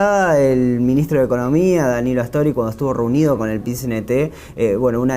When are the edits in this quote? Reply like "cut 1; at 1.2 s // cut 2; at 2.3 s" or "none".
cut 1; at 3.3 s